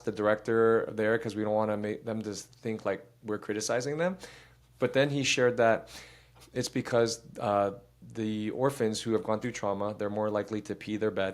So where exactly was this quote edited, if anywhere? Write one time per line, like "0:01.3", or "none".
none